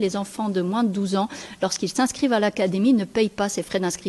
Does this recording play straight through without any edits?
yes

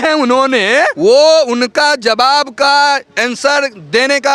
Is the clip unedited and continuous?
no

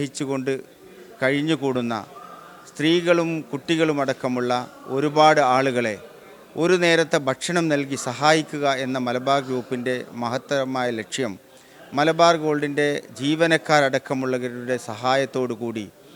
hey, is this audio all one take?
yes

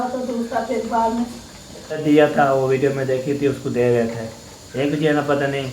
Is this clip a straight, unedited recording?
no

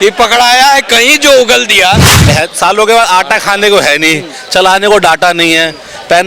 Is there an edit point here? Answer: yes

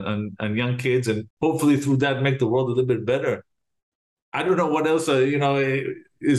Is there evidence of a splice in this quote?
yes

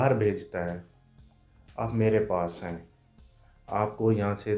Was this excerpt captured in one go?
yes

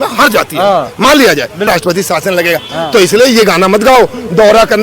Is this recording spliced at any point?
yes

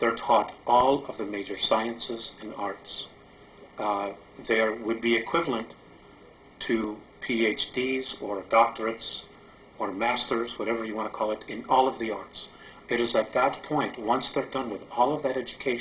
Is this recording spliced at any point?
no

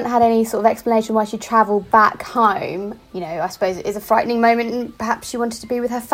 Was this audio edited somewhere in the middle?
yes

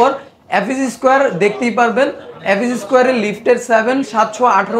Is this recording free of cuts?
yes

